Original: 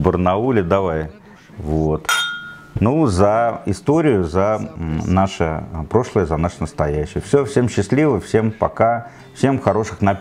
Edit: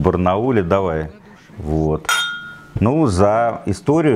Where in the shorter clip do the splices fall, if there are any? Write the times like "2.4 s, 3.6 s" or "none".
none